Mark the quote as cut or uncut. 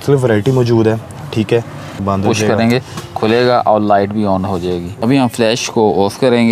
cut